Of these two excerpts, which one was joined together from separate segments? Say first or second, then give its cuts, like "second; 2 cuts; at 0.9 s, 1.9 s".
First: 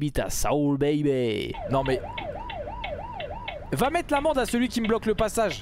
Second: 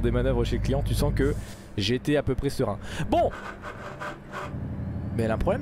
first; 1 cut; at 1.6 s